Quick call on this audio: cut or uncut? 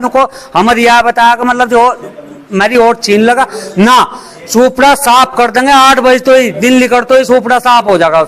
uncut